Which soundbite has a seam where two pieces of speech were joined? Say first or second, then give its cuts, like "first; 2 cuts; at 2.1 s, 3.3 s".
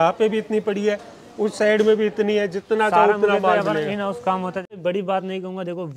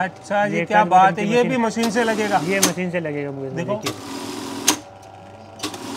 first; 1 cut; at 4.8 s